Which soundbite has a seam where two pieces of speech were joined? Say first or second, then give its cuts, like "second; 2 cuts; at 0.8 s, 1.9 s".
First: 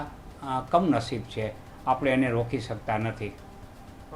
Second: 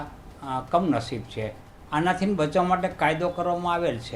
second; 1 cut; at 1.6 s